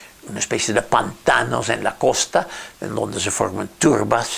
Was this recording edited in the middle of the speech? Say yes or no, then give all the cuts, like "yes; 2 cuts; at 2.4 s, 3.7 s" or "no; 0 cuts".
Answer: yes; 1 cut; at 2.6 s